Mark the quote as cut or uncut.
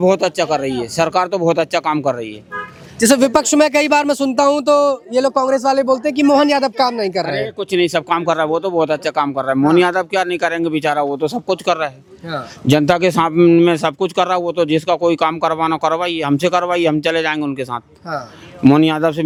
uncut